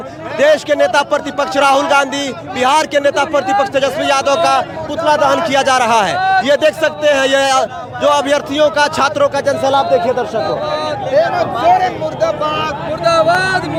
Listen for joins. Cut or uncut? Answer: uncut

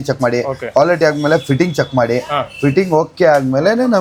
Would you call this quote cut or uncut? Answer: uncut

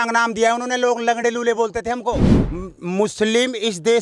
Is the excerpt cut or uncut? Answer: cut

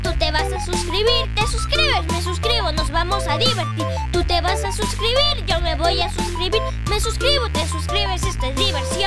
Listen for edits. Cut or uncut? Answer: uncut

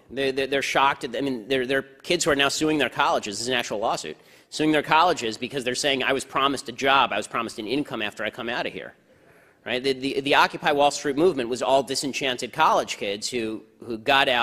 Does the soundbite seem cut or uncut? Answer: cut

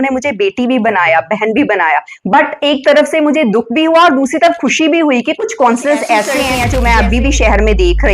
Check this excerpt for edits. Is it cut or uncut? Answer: cut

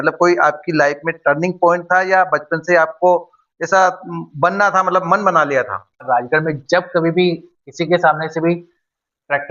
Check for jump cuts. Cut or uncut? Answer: cut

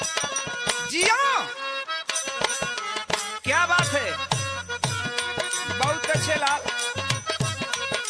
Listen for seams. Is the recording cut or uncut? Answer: uncut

